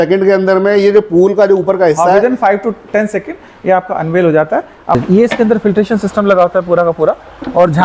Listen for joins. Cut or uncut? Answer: cut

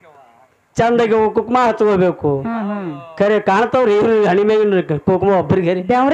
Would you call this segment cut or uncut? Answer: uncut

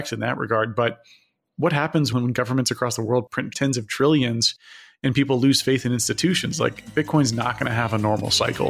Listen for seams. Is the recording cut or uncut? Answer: cut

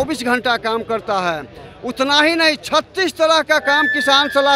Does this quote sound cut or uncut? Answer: uncut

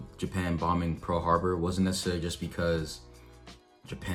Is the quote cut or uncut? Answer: uncut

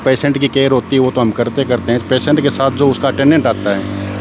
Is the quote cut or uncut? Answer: uncut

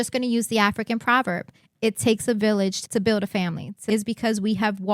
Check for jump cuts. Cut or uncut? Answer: cut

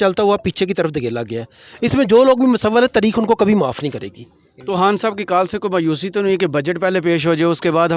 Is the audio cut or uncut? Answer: uncut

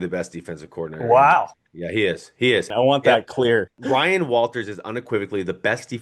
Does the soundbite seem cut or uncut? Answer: cut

